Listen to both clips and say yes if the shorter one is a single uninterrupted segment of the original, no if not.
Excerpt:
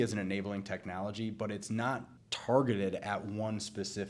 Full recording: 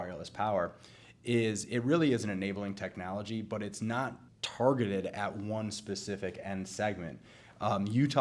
yes